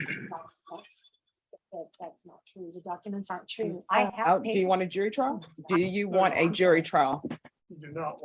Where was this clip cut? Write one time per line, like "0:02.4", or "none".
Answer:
0:04.1
0:05.5